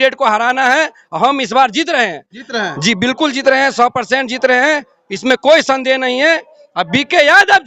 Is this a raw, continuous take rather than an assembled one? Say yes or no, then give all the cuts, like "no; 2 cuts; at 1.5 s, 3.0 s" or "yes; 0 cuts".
yes; 0 cuts